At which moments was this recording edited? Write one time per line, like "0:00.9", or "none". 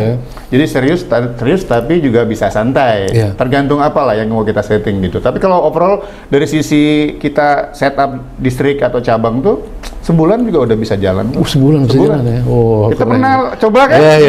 none